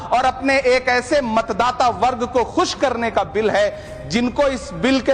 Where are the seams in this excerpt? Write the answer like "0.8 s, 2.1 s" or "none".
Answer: none